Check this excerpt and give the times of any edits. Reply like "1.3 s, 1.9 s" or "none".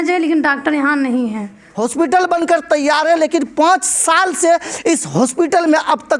1.6 s